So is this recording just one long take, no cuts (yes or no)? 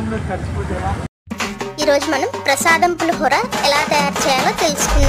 no